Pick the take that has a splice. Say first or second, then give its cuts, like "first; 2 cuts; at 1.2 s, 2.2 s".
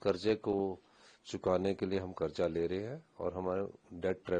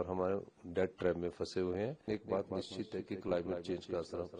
second; 1 cut; at 2.1 s